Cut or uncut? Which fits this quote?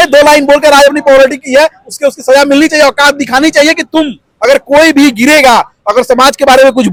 uncut